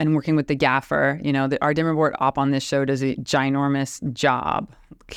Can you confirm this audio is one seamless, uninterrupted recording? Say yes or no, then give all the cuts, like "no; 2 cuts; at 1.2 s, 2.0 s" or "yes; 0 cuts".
yes; 0 cuts